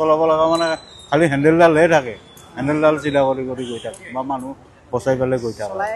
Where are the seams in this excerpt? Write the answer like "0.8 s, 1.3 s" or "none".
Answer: none